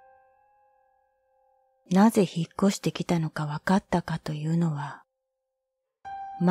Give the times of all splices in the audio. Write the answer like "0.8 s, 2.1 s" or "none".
1.1 s